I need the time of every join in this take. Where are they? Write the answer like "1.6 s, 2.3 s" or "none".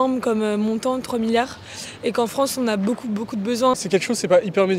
3.7 s